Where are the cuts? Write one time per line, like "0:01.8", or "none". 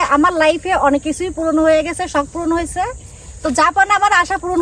none